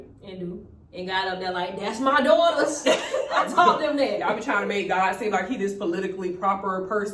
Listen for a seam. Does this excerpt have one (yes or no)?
no